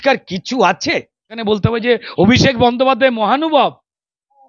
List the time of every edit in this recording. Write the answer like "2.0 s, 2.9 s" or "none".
1.4 s